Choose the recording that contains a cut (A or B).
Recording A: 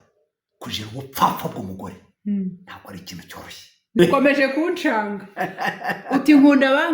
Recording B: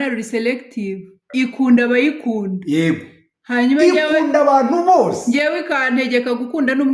A